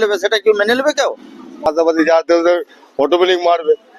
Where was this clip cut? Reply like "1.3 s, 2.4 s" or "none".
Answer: 1.7 s